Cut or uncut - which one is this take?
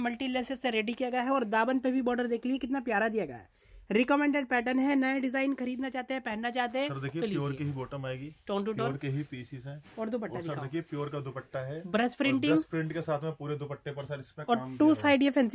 uncut